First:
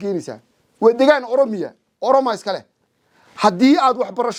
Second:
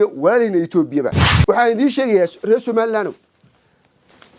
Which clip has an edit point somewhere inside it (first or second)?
second